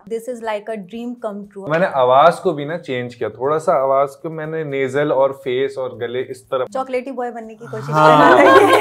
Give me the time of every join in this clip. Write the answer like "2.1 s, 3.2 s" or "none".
1.7 s, 6.7 s